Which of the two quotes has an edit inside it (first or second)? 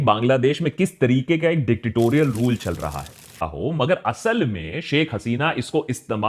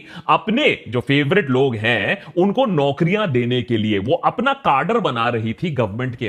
first